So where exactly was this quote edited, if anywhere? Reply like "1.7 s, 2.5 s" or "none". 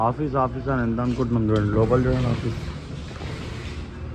none

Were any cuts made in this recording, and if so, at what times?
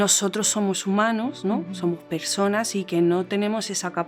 none

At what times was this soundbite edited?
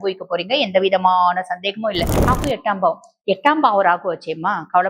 2.3 s

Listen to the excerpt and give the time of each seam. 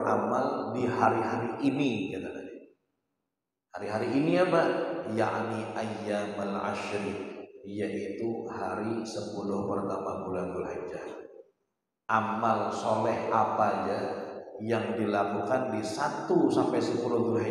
12.0 s

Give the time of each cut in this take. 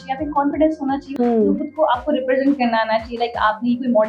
1.1 s

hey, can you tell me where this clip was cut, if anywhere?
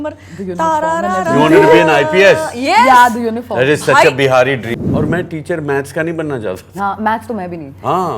4.7 s

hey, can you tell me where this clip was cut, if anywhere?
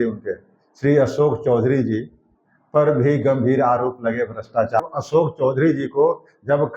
4.8 s

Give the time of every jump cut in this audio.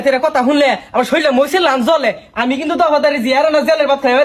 none

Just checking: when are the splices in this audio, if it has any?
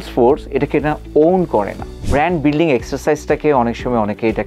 1.9 s

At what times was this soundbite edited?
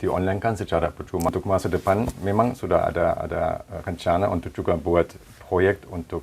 1.3 s

